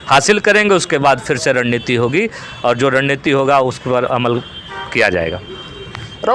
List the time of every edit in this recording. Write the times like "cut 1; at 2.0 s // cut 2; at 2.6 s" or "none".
none